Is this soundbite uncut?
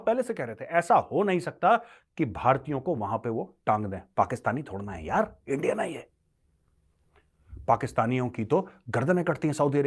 yes; 0 cuts

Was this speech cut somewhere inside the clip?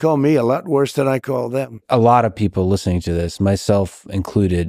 yes; 1 cut; at 1.2 s

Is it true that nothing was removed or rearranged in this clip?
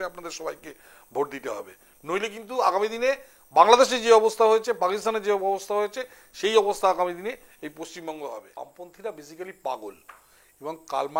no; 1 cut; at 8.6 s

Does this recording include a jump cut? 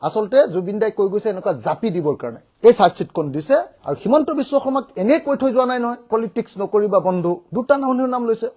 yes; 2 cuts; at 2.5 s, 7.4 s

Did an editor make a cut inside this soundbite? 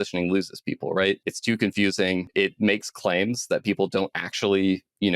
yes; 2 cuts; at 1.3 s, 2.3 s

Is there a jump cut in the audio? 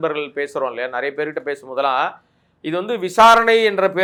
no; 0 cuts

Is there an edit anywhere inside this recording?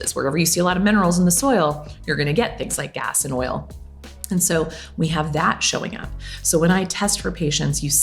no; 0 cuts

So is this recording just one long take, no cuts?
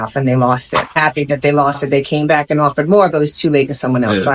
no; 1 cut; at 1.0 s

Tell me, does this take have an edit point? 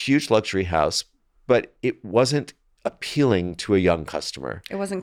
no; 0 cuts

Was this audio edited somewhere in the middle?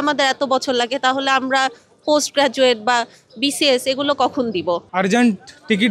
yes; 1 cut; at 4.9 s

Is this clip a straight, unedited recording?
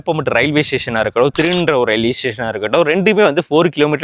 yes; 0 cuts

